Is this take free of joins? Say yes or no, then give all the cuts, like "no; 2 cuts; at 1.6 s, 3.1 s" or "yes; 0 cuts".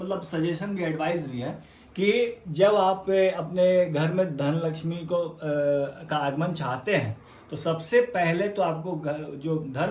yes; 0 cuts